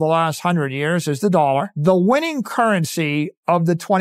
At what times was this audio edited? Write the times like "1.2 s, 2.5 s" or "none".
1.7 s